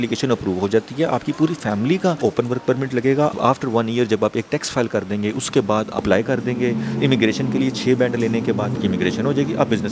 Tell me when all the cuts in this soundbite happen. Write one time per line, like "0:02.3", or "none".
0:02.2
0:03.4
0:06.0
0:08.8